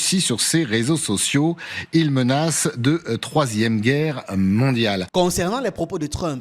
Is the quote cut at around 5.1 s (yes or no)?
yes